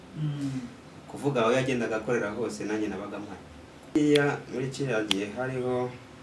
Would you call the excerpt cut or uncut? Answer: cut